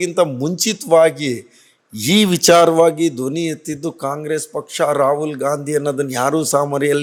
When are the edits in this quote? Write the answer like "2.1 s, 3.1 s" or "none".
none